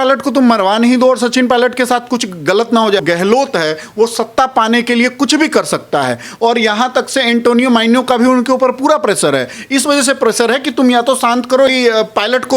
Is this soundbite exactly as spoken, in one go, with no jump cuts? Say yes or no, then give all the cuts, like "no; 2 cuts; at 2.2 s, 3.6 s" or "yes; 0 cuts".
no; 2 cuts; at 3.0 s, 11.7 s